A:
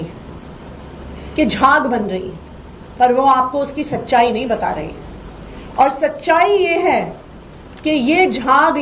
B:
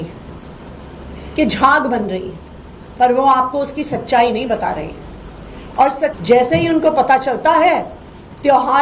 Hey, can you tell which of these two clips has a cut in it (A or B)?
B